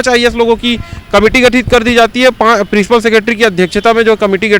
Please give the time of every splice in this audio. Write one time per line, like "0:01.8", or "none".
none